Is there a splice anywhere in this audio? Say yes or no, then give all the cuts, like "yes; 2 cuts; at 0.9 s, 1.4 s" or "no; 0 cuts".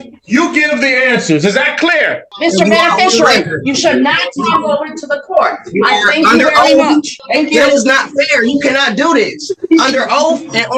yes; 2 cuts; at 2.3 s, 7.2 s